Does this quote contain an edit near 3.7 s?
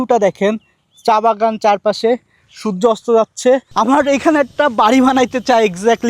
yes; 1 cut; at 3.7 s

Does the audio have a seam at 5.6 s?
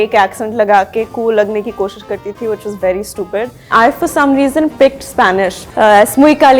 yes; 2 cuts; at 3.7 s, 5.6 s

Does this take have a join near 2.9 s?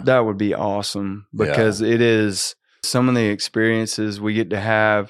yes; 1 cut; at 2.9 s

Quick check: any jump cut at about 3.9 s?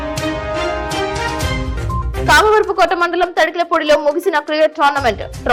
no; 1 cut; at 2.2 s

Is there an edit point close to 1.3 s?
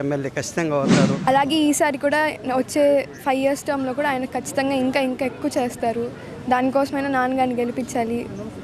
yes; 1 cut; at 1.3 s

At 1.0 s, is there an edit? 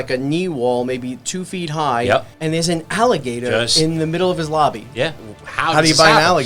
no; 2 cuts; at 2.3 s, 5.2 s

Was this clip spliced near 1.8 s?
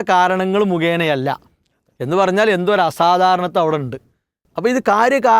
no; 1 cut; at 4.5 s

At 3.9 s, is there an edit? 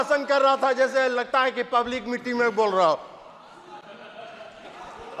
no; 0 cuts

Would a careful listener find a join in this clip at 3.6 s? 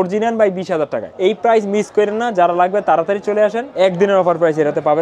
yes; 2 cuts; at 1.1 s, 3.6 s

